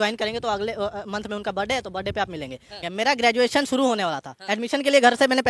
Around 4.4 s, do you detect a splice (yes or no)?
no